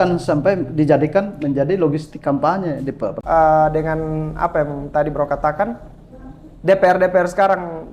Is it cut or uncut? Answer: cut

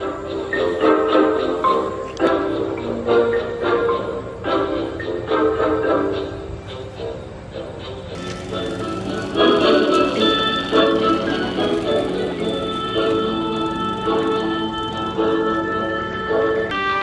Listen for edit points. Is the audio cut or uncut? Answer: uncut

